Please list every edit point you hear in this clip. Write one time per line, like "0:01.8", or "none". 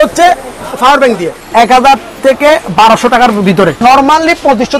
0:01.3
0:03.8